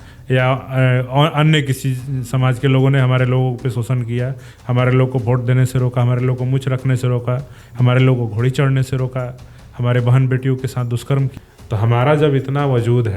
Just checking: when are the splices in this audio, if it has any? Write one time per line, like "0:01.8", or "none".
0:11.3